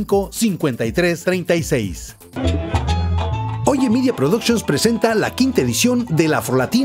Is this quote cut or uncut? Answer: cut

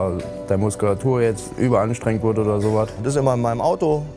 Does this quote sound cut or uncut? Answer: cut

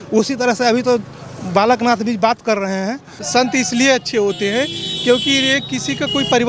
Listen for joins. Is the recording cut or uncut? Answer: cut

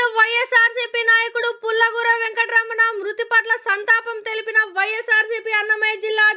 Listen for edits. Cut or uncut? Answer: uncut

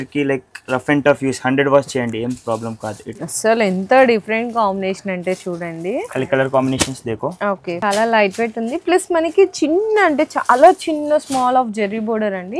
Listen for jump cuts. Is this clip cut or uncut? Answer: cut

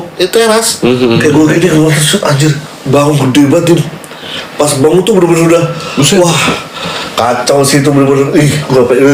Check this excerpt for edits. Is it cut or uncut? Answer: uncut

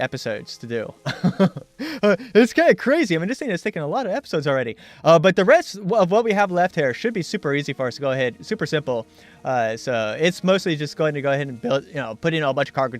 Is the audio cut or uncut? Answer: cut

